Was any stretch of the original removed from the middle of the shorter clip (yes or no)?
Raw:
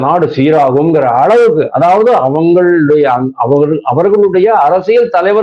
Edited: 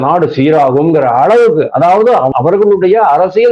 yes